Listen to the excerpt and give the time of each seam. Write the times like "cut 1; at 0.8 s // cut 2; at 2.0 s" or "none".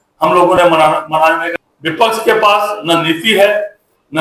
cut 1; at 1.5 s